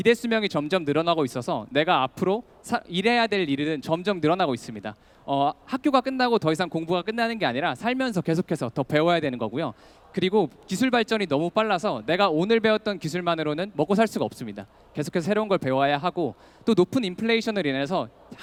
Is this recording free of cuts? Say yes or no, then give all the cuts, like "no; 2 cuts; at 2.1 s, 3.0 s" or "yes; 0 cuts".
yes; 0 cuts